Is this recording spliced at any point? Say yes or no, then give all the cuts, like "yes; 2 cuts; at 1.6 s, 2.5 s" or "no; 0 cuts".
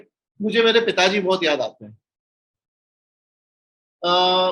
no; 0 cuts